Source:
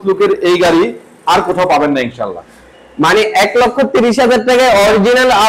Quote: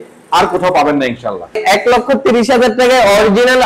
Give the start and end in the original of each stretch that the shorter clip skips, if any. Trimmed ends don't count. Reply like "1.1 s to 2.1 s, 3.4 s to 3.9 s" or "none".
2.5 s to 3.3 s